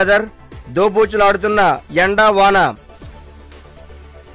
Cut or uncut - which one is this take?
uncut